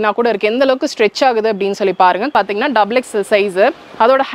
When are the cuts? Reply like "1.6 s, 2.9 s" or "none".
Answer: 2.3 s

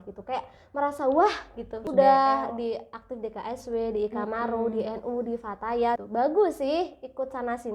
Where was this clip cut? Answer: 1.8 s, 6.0 s

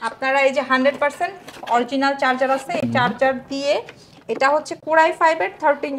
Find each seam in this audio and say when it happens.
none

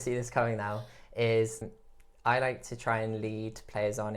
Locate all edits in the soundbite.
1.6 s

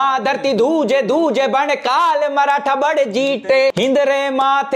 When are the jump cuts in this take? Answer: 3.8 s

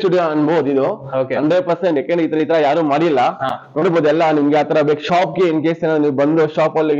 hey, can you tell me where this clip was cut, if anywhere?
none

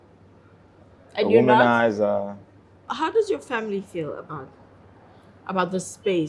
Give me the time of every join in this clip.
2.9 s

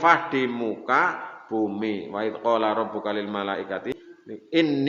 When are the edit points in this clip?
3.9 s

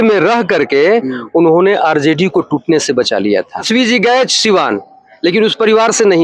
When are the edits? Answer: 3.7 s

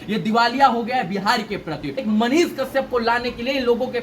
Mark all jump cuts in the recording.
2.0 s

